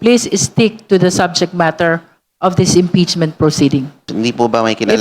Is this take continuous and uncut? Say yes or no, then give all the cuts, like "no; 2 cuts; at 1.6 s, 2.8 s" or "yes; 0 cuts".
no; 1 cut; at 4.1 s